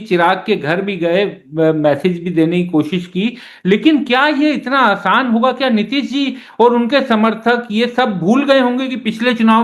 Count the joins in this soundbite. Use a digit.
0